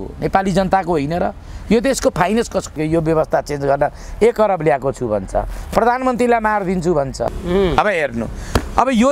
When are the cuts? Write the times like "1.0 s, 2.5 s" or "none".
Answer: 2.8 s, 7.3 s